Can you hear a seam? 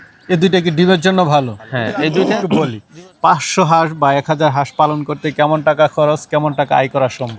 yes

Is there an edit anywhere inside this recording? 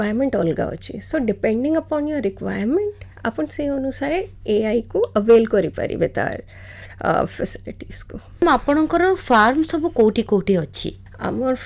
no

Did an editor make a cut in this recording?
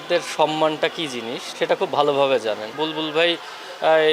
yes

